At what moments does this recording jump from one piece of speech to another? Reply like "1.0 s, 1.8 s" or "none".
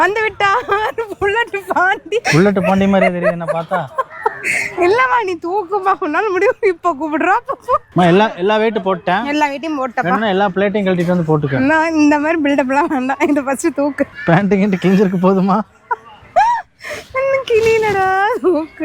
2.3 s, 7.9 s, 14.2 s